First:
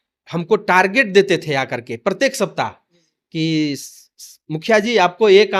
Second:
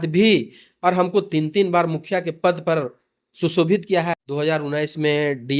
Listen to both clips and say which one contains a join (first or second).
second